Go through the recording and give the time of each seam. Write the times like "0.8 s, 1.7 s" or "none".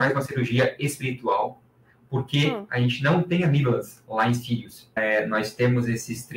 4.9 s